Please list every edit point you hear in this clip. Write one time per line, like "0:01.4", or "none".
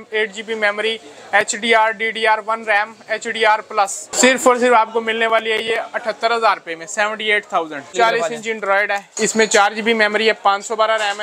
0:04.0
0:07.9
0:09.1